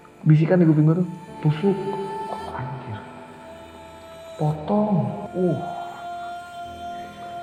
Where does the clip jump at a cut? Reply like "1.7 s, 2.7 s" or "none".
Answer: none